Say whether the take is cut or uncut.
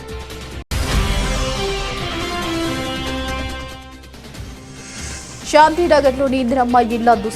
cut